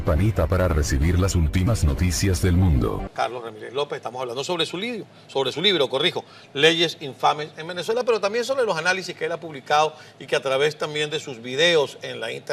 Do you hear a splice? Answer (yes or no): yes